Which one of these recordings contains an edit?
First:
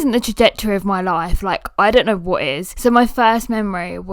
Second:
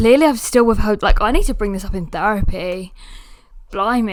first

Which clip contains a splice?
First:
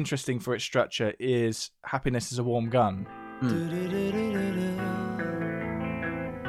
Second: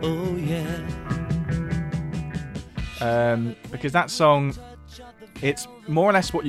second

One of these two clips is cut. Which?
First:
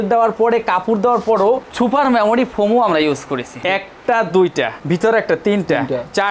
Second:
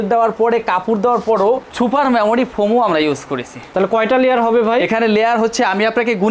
first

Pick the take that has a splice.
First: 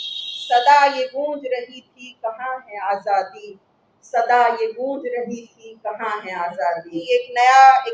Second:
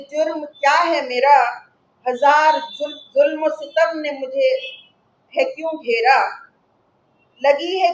first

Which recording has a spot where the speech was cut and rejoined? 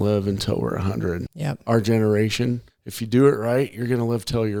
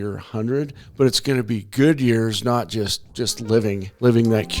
second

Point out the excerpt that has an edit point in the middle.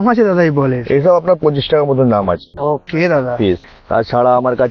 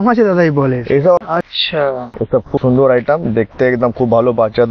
second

